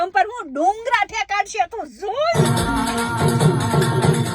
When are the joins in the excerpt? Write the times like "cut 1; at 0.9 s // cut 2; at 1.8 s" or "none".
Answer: cut 1; at 2.4 s

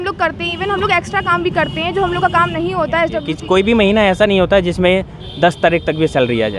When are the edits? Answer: cut 1; at 3.3 s

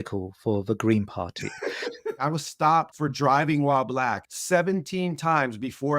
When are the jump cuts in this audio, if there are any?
cut 1; at 2.2 s // cut 2; at 2.9 s // cut 3; at 4.3 s

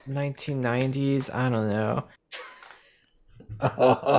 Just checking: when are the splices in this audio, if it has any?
cut 1; at 2.2 s

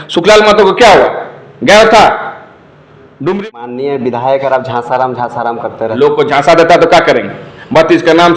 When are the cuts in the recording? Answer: cut 1; at 3.7 s

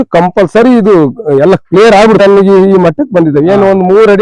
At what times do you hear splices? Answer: cut 1; at 2.2 s

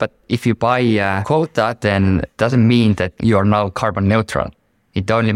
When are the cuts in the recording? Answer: cut 1; at 1.2 s

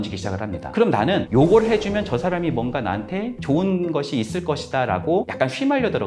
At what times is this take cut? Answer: none

